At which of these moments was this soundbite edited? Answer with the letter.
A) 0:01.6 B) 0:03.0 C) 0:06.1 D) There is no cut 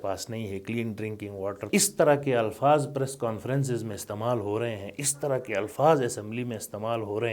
A